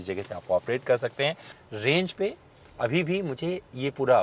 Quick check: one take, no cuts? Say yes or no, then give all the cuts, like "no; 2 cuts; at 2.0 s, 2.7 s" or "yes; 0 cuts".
no; 1 cut; at 1.5 s